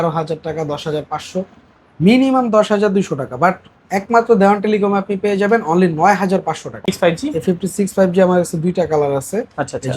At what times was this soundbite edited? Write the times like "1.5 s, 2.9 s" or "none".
6.7 s